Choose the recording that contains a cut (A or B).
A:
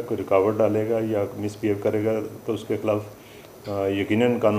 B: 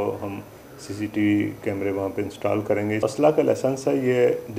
B